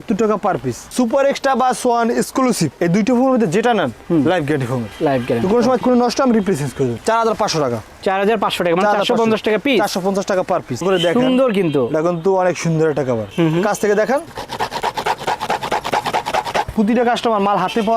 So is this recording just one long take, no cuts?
no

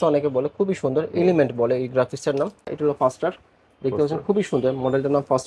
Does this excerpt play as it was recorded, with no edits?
no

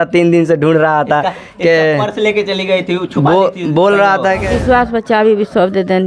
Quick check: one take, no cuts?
no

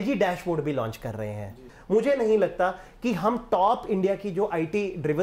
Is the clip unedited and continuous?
no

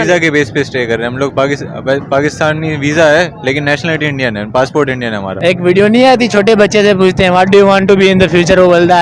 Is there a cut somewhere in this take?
yes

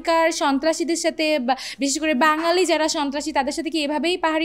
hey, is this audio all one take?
yes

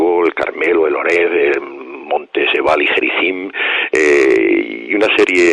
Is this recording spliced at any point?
yes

